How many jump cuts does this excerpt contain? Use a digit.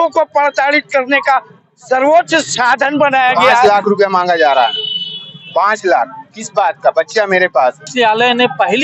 2